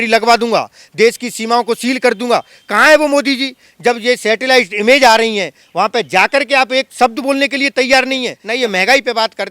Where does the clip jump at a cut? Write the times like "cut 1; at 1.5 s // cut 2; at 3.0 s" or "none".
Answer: cut 1; at 8.4 s